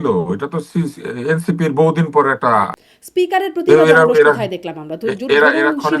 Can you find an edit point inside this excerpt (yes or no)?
yes